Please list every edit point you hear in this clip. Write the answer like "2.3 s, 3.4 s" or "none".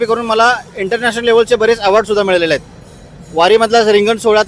none